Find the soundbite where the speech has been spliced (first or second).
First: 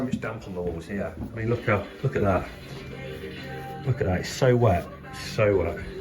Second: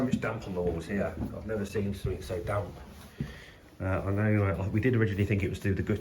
first